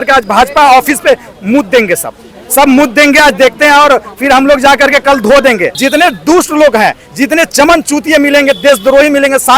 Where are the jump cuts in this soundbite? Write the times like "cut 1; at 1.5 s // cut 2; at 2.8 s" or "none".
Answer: cut 1; at 5.8 s